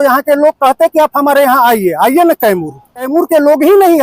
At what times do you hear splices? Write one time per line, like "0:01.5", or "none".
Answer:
0:03.1